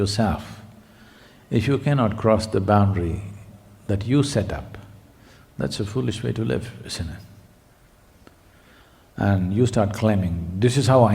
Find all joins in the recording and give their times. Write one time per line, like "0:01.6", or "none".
0:08.1